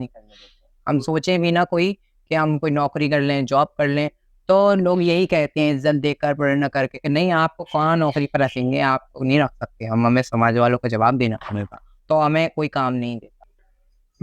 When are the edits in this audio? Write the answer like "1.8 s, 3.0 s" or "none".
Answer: 13.3 s